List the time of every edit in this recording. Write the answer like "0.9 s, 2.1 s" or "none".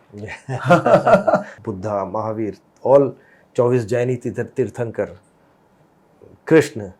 1.6 s